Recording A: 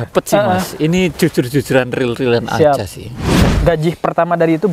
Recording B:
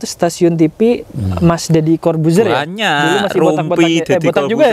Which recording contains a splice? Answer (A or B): A